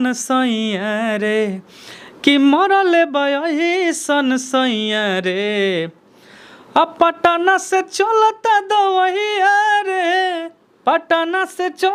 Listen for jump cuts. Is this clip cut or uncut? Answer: uncut